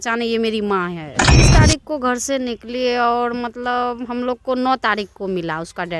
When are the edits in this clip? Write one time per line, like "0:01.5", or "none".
0:01.4